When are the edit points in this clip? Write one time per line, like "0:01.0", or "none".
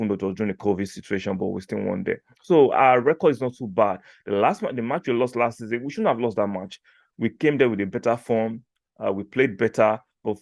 none